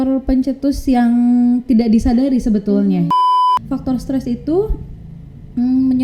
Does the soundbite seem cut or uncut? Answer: cut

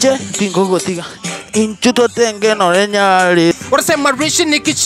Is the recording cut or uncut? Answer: cut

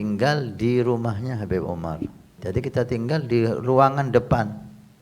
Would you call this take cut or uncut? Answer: cut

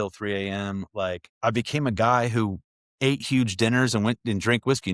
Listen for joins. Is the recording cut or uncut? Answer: cut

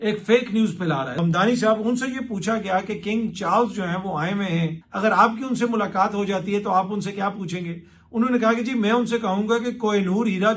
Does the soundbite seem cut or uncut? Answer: cut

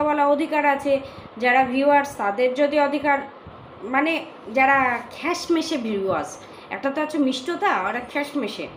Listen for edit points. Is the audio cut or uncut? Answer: uncut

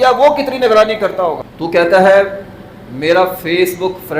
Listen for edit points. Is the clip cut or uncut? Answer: cut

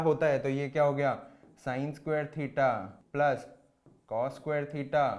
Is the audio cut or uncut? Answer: cut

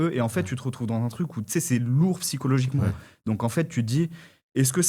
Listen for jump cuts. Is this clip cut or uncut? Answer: uncut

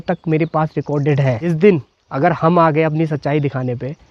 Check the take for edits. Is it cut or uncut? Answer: cut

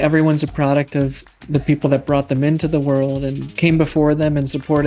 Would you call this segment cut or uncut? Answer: uncut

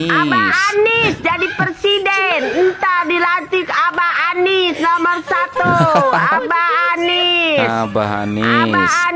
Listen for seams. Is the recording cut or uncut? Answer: uncut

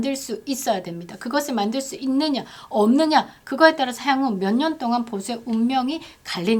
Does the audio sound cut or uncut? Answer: uncut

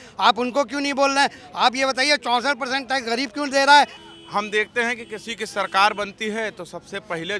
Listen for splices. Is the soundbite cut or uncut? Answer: cut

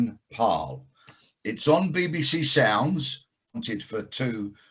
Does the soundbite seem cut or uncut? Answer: cut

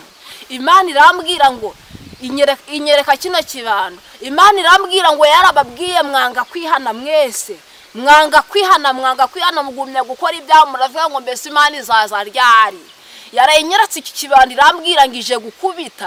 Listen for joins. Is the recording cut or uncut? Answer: uncut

